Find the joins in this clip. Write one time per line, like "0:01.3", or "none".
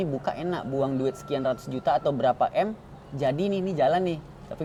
none